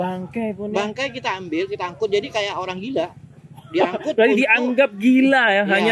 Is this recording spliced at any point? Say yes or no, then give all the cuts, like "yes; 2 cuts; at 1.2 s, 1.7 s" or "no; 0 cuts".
no; 0 cuts